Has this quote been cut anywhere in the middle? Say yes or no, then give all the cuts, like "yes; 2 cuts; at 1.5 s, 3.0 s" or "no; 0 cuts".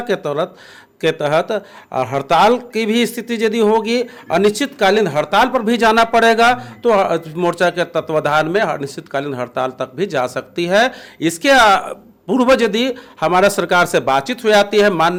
no; 0 cuts